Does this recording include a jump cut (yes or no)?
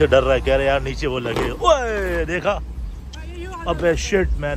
no